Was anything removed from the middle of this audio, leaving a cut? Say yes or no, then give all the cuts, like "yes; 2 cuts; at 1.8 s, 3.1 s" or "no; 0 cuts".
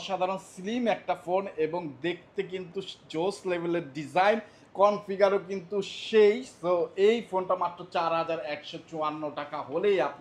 no; 0 cuts